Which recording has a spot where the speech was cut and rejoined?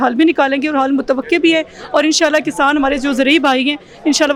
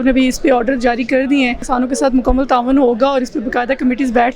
second; 1 cut; at 1.6 s

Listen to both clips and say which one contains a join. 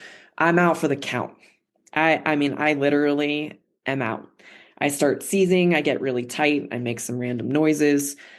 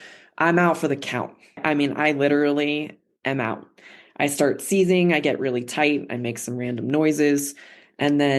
second; 1 cut; at 1.6 s

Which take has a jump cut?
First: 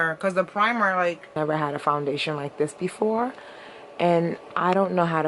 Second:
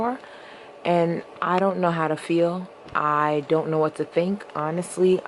first; 1 cut; at 1.3 s

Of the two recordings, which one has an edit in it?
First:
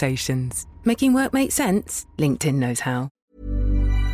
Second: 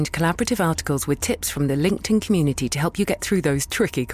first; 1 cut; at 3.1 s

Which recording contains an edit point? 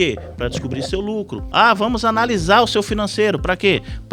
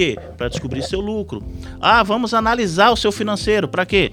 first; 1 cut; at 1.4 s

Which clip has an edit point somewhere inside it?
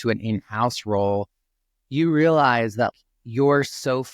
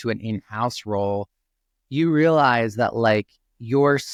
first; 1 cut; at 2.9 s

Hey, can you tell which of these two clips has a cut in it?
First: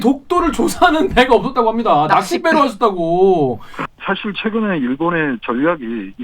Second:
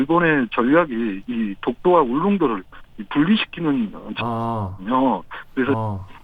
first; 1 cut; at 3.8 s

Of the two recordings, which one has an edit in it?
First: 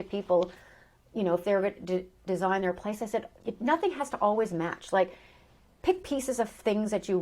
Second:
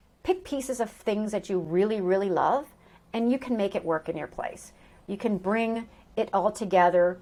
first; 1 cut; at 3.3 s

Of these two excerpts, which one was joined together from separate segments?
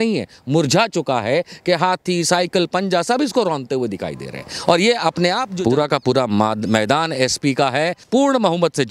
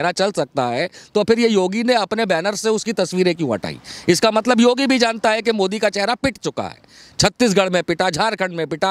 first; 2 cuts; at 5.5 s, 8.0 s

